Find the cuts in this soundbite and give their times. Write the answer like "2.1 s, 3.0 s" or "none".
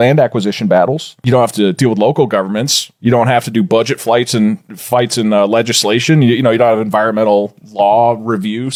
none